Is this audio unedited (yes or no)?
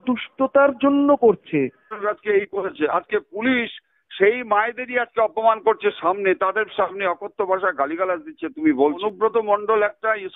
no